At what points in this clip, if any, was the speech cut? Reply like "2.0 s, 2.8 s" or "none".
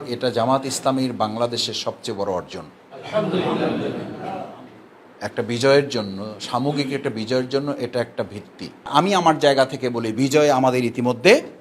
8.9 s